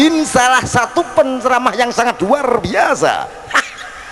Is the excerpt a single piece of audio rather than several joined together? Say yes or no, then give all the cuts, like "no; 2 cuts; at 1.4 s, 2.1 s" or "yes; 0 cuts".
yes; 0 cuts